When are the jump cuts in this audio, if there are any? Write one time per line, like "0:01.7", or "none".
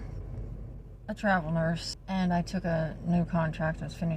0:01.9